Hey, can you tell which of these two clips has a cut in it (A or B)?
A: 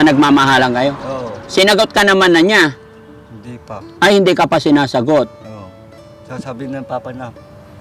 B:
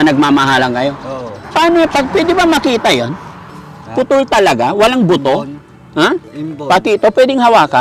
B